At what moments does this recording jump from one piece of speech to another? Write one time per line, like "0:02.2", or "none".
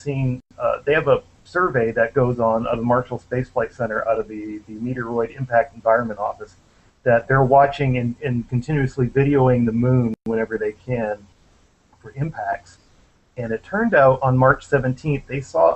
none